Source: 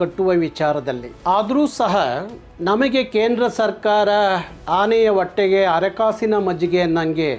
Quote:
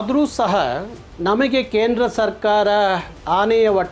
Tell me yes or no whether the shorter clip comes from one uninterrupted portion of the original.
yes